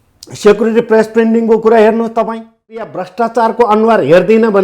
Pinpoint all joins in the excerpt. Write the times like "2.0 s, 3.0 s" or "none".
3.0 s